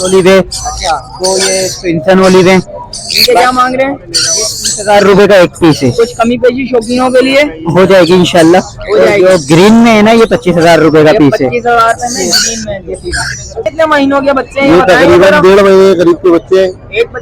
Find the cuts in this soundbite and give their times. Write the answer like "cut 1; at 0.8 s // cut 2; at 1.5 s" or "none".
cut 1; at 13.6 s

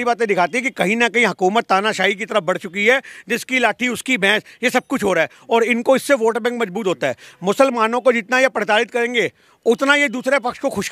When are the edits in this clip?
none

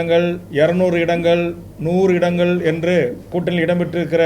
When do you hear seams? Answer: cut 1; at 3.3 s

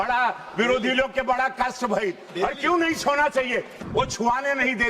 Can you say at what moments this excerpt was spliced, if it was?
cut 1; at 3.8 s

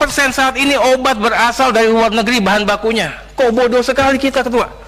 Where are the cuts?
none

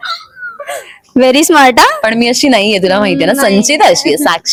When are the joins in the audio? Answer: none

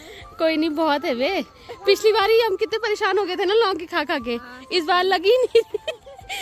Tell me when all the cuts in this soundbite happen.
none

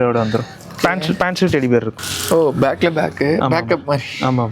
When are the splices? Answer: cut 1; at 2.0 s

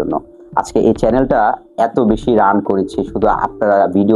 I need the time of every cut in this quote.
none

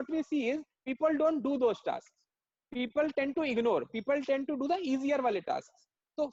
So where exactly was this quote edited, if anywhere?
none

